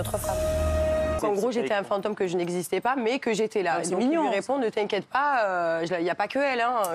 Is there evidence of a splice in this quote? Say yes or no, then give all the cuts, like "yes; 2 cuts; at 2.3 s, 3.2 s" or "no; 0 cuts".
yes; 1 cut; at 1.2 s